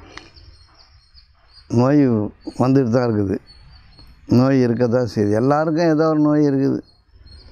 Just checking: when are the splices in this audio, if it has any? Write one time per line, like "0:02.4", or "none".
none